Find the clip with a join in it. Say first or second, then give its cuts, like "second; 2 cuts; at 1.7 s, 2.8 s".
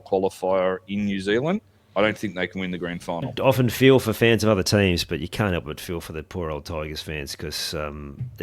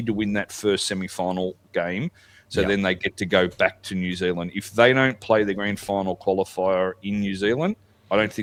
first; 1 cut; at 3.3 s